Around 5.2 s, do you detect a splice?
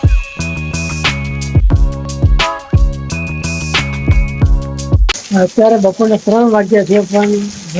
yes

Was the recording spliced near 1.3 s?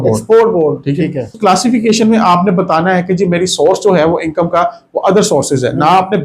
yes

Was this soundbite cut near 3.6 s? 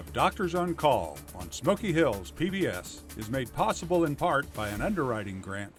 no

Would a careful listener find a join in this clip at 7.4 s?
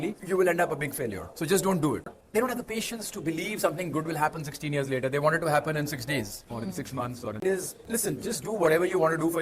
yes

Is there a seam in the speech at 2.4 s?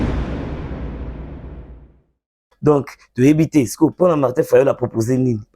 yes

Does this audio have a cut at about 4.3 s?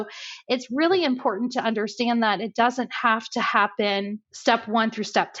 yes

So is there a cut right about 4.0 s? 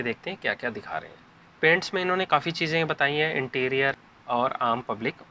yes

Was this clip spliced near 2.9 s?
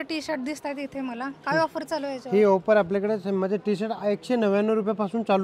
no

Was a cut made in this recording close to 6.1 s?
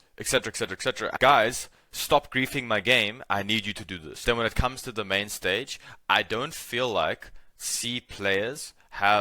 no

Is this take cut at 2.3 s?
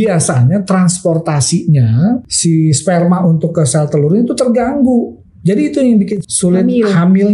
yes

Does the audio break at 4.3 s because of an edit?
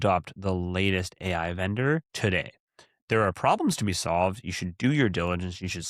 no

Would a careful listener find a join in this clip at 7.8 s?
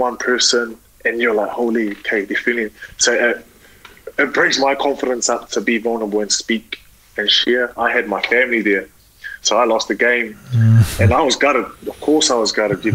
yes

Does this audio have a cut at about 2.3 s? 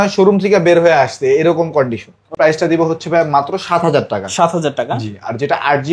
yes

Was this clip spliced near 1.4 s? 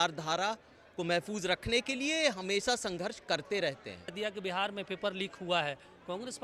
no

